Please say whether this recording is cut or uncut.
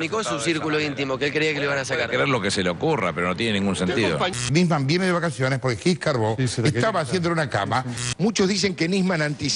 cut